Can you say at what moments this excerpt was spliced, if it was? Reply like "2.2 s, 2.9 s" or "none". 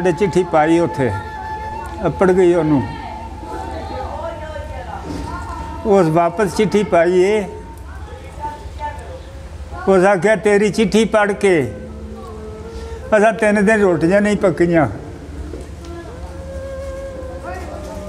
none